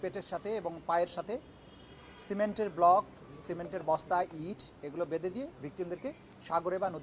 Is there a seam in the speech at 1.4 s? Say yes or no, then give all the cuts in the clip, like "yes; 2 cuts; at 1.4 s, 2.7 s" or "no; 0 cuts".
no; 0 cuts